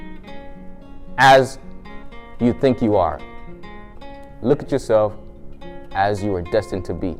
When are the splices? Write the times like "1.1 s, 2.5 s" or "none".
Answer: none